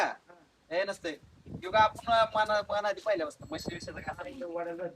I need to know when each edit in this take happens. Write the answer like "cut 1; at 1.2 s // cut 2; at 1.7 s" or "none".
none

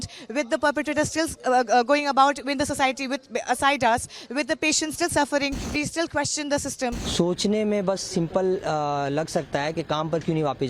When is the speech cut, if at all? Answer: cut 1; at 5.6 s // cut 2; at 7.0 s

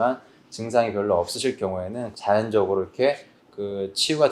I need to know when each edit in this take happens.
cut 1; at 2.0 s

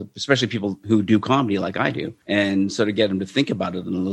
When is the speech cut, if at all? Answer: cut 1; at 0.8 s // cut 2; at 2.1 s

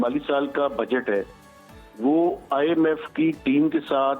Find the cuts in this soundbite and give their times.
none

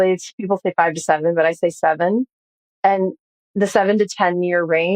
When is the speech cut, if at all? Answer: none

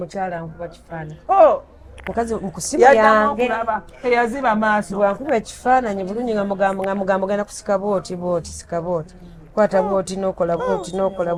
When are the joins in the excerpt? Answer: none

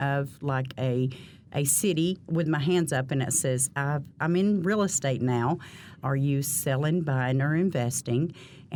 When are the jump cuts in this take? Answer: none

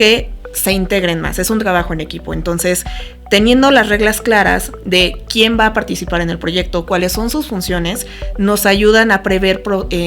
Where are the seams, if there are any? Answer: none

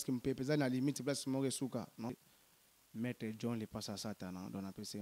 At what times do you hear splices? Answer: cut 1; at 2.2 s

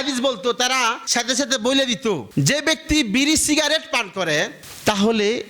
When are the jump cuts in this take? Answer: cut 1; at 1.0 s // cut 2; at 2.3 s

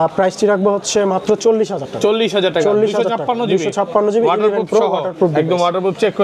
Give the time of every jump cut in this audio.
none

